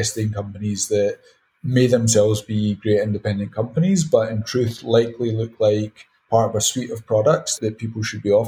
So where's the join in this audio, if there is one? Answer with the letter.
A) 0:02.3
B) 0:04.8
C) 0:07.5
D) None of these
C